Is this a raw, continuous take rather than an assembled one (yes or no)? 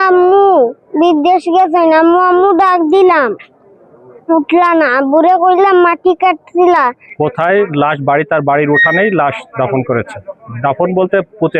no